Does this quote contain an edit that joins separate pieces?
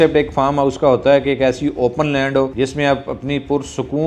yes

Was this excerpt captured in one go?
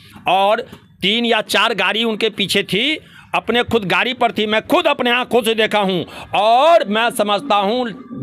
yes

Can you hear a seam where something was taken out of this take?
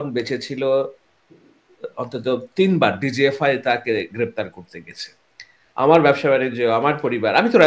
no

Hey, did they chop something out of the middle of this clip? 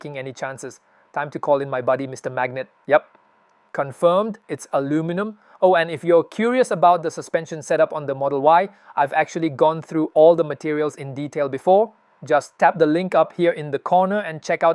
no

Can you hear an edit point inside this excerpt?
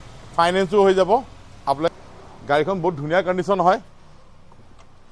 yes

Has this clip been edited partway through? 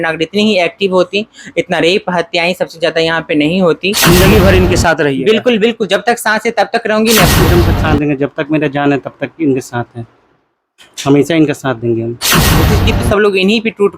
yes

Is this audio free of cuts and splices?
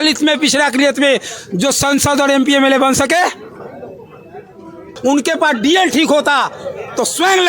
no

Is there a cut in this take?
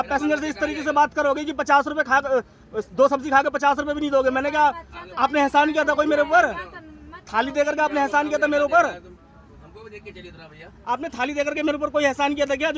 no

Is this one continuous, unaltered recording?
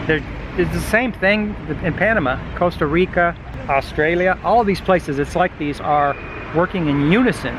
no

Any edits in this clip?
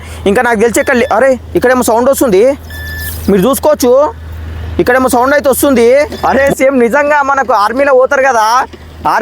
yes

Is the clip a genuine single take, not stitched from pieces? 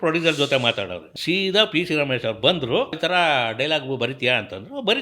no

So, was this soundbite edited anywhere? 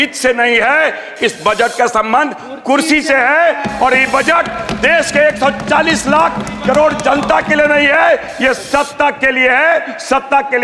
no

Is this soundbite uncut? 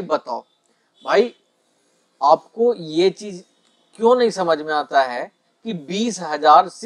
yes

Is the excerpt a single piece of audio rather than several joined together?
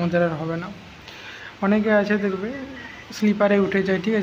yes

